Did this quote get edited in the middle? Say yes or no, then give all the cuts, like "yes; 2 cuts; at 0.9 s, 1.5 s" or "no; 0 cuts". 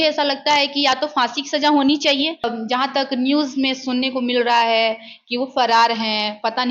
yes; 1 cut; at 2.5 s